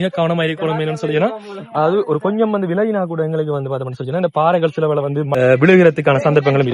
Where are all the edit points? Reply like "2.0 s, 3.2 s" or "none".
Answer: 5.3 s